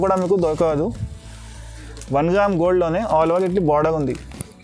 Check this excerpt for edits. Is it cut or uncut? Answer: uncut